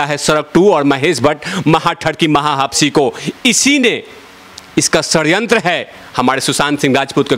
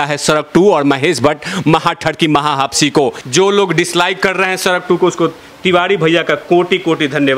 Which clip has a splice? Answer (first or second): second